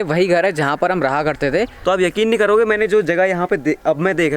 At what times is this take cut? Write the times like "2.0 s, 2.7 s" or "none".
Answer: 1.7 s